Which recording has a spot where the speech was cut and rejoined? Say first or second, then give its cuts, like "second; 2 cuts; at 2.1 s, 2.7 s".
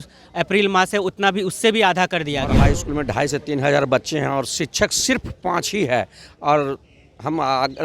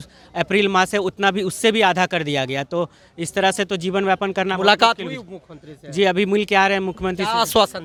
first; 1 cut; at 2.6 s